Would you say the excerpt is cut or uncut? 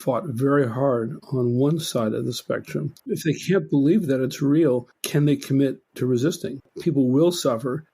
cut